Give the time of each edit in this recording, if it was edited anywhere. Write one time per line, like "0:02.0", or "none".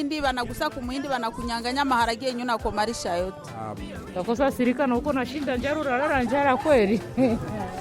0:03.7